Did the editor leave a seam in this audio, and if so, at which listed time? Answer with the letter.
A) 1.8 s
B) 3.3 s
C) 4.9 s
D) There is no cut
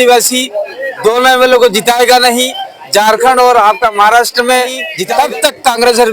C